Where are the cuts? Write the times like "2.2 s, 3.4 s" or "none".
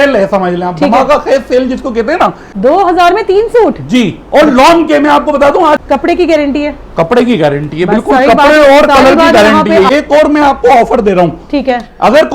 2.4 s, 5.8 s, 9.9 s